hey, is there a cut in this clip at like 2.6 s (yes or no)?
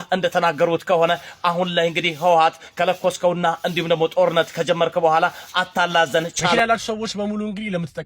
no